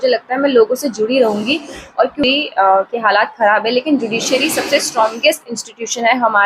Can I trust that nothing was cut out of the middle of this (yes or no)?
no